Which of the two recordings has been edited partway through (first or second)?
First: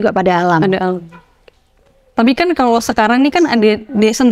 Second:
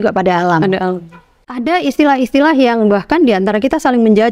second